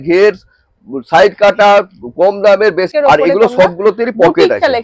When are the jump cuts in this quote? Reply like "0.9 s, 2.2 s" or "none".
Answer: 2.9 s